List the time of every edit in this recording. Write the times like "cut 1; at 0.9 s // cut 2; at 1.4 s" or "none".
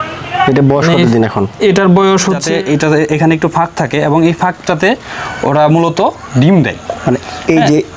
cut 1; at 2.4 s